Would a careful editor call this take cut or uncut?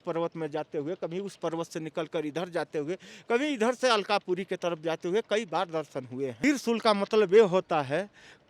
cut